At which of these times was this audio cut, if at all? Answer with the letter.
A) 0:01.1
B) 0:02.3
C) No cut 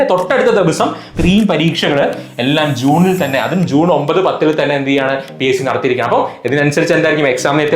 A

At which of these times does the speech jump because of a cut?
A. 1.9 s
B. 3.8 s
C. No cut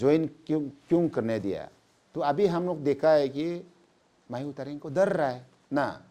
C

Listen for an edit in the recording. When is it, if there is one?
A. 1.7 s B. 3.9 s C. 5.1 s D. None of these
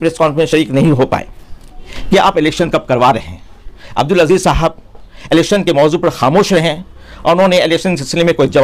A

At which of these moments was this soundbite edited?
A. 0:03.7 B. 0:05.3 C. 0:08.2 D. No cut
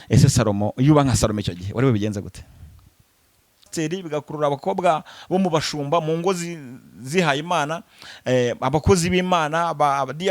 A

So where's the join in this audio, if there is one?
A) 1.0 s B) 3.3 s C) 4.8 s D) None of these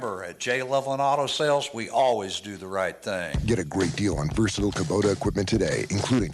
B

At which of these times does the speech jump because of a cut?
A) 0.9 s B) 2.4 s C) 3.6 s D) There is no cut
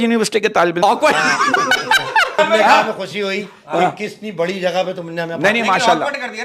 B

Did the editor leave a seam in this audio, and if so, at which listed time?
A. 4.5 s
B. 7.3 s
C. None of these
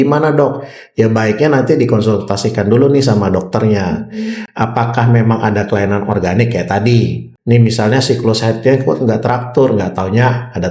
B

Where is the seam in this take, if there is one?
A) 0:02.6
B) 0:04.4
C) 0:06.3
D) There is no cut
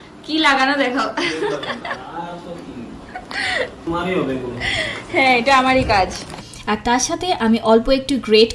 C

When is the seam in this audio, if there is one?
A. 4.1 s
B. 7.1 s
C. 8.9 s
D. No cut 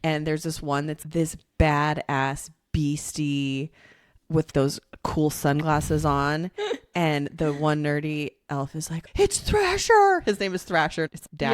C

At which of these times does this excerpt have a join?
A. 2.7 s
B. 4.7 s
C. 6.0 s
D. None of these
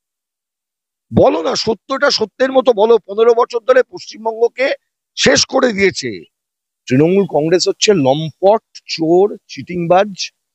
C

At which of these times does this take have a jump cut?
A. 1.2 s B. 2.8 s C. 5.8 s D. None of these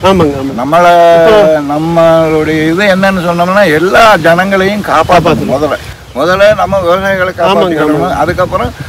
D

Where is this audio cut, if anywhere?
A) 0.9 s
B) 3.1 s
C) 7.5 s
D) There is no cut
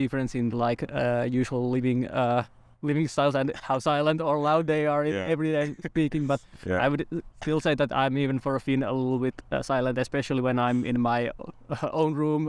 D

